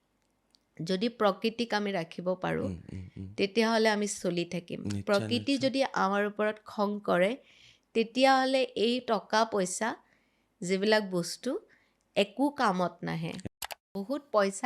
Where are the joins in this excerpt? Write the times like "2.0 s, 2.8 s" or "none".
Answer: 13.6 s